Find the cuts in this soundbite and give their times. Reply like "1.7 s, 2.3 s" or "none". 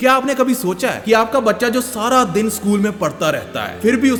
none